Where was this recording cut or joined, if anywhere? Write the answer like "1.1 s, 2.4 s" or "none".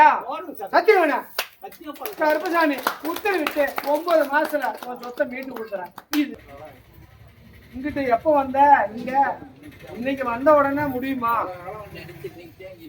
6.4 s